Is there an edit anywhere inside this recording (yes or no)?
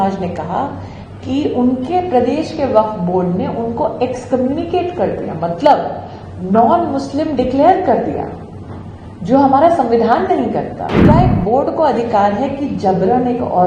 yes